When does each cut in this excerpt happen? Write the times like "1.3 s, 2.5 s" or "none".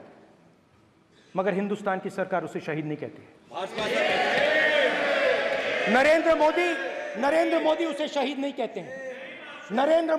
none

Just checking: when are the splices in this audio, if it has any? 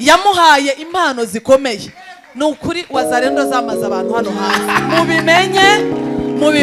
none

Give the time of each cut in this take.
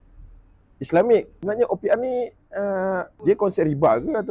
1.3 s, 3.1 s

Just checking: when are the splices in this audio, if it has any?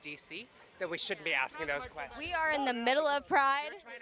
3.1 s

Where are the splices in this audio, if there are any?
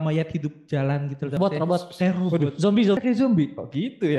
1.4 s, 3.0 s

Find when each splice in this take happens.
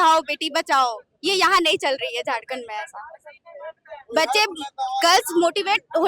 none

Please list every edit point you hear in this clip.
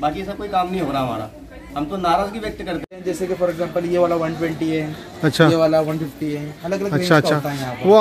3.0 s

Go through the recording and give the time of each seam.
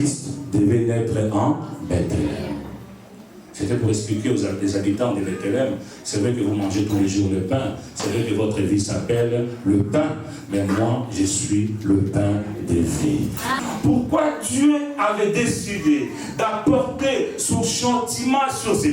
13.5 s

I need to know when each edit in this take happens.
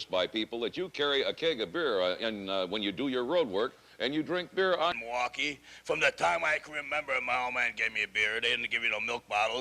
5.0 s

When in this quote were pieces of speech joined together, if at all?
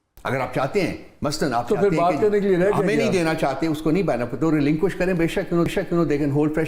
none

